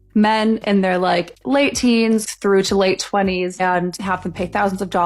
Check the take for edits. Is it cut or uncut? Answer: uncut